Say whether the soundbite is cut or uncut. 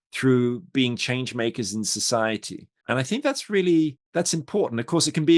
cut